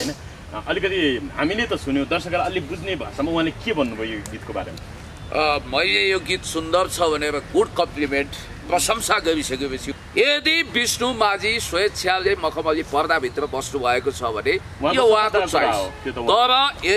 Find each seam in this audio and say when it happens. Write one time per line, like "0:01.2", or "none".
0:09.9